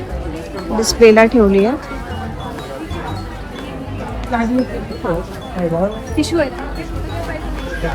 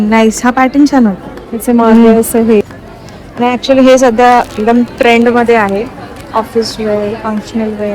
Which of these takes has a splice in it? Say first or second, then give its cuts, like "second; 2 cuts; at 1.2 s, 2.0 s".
second; 1 cut; at 2.6 s